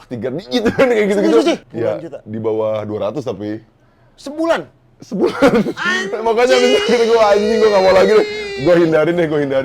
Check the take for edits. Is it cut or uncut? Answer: cut